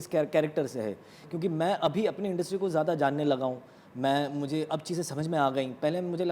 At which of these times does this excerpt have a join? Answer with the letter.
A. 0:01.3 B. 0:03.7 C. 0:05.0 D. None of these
D